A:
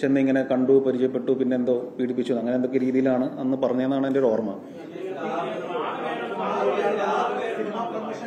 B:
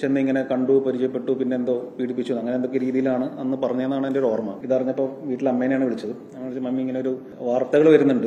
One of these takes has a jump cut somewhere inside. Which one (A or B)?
B